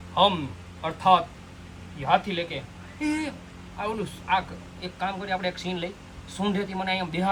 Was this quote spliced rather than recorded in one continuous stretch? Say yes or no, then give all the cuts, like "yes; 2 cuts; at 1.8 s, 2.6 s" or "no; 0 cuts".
no; 0 cuts